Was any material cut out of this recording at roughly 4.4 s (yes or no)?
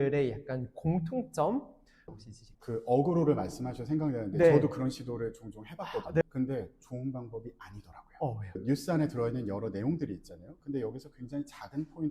no